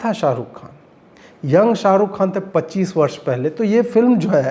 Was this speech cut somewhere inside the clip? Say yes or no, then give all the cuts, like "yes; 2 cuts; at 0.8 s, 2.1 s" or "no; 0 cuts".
no; 0 cuts